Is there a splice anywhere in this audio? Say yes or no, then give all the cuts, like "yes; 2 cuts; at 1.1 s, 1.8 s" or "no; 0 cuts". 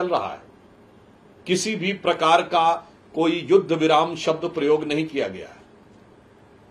no; 0 cuts